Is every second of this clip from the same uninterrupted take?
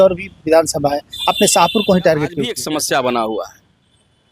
no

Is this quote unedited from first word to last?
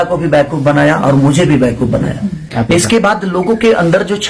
no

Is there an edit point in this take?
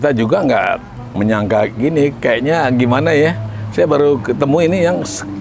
yes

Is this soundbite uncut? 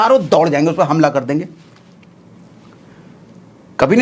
yes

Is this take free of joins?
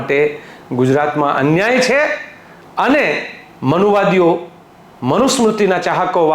yes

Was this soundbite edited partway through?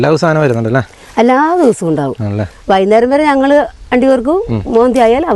no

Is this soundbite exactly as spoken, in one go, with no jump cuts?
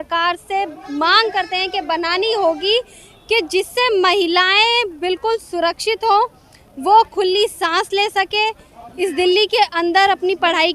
yes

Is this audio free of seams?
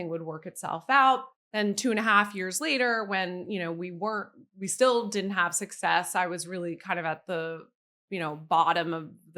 no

